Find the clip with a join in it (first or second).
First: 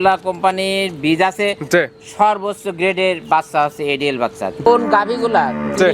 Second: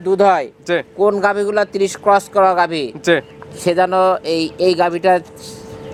first